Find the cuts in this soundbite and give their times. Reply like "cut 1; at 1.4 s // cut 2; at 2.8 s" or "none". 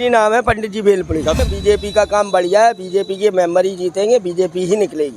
cut 1; at 1.4 s